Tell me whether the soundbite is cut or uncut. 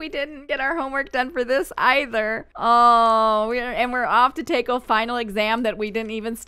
uncut